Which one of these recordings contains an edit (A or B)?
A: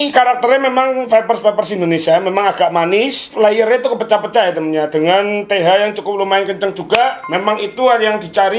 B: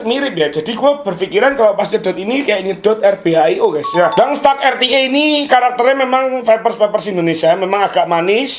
B